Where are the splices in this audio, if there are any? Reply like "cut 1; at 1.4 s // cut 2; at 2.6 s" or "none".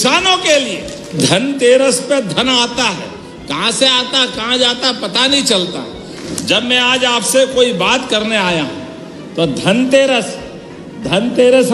cut 1; at 1.2 s // cut 2; at 6.1 s